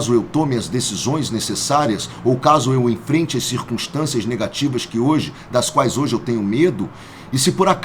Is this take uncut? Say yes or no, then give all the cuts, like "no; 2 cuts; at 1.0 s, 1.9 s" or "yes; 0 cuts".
yes; 0 cuts